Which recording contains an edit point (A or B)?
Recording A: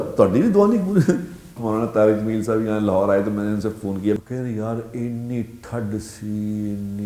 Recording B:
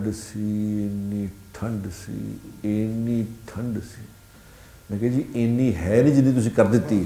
A